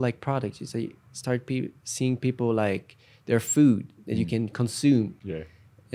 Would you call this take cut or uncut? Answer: uncut